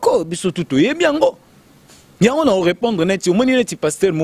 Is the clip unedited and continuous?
yes; 0 cuts

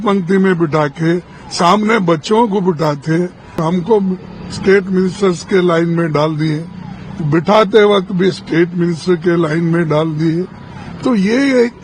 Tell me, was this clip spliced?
yes; 1 cut; at 3.6 s

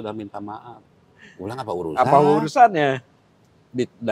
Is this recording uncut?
yes; 0 cuts

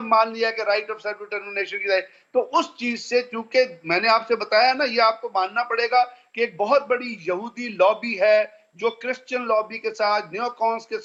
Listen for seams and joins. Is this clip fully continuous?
yes; 0 cuts

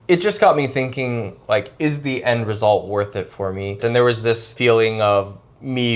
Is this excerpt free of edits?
no; 1 cut; at 3.8 s

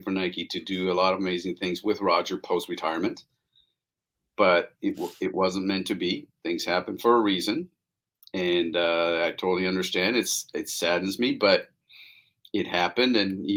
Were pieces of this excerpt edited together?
no; 0 cuts

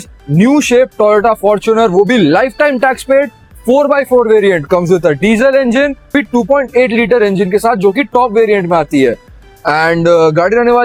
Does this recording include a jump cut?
no; 0 cuts

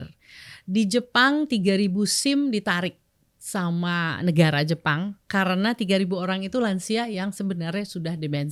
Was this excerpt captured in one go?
yes; 0 cuts

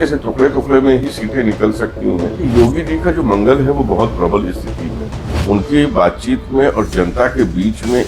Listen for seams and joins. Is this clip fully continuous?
no; 2 cuts; at 2.4 s, 5.2 s

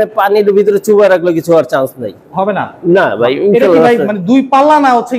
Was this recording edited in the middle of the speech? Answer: no; 0 cuts

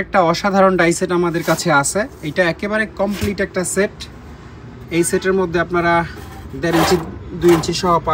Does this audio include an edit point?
no; 0 cuts

